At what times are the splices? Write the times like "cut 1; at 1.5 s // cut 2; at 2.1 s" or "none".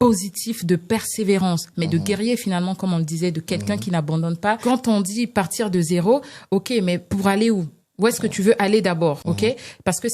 cut 1; at 4.6 s // cut 2; at 9.2 s